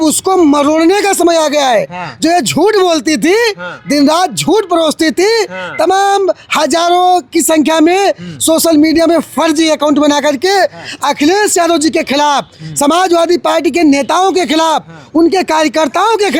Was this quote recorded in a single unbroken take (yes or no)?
yes